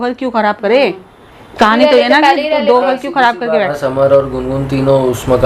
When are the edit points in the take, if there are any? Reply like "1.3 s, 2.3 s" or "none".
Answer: 3.6 s

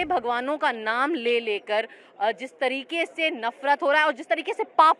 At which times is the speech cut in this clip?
none

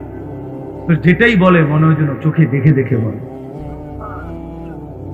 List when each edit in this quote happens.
3.1 s

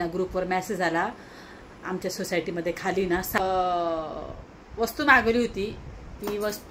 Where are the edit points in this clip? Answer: 3.4 s

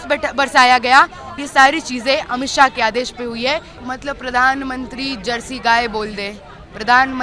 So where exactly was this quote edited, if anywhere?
1.3 s, 3.8 s

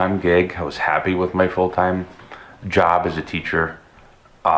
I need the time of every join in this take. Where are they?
none

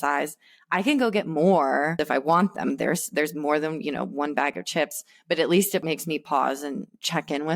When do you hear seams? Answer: 1.9 s, 5.8 s

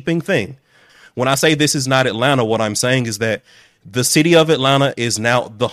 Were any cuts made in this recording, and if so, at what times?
1.0 s

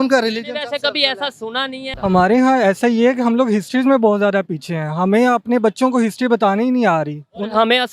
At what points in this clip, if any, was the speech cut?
2.0 s

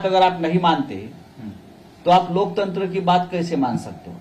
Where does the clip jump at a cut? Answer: none

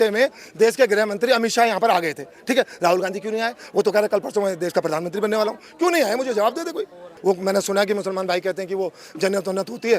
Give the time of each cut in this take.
7.1 s

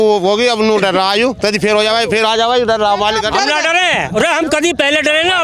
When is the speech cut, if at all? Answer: none

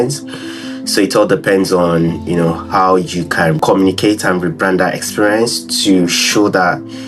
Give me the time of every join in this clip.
3.6 s

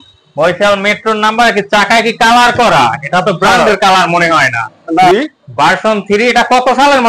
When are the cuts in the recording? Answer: 5.1 s

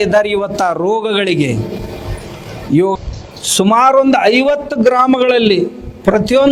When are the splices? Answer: 3.0 s

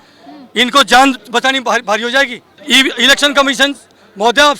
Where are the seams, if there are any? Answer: 2.6 s

